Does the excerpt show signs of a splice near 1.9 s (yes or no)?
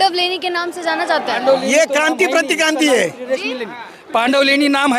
no